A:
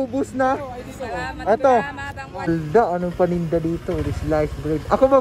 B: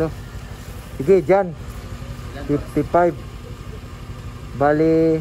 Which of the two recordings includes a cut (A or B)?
A